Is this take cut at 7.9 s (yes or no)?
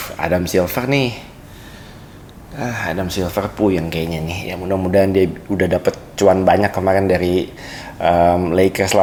no